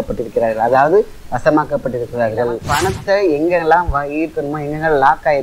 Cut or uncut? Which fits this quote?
cut